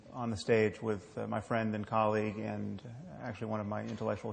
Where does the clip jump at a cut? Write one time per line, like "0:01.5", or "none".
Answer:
0:00.9